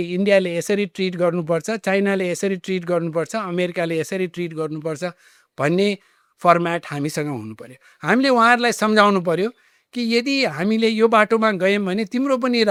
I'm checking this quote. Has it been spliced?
no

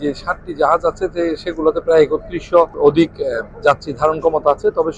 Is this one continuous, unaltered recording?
no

